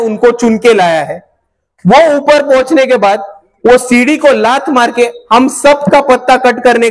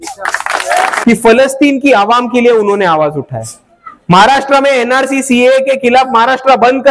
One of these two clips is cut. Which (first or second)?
second